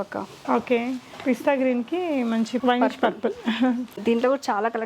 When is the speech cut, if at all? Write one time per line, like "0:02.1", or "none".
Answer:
0:02.6
0:03.9